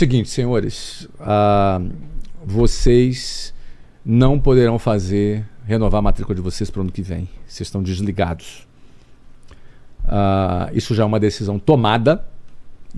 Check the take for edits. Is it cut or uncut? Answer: uncut